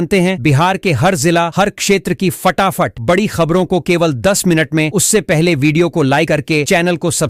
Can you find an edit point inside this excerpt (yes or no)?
no